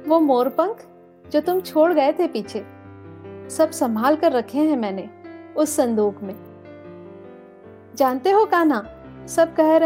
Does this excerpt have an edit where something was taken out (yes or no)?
no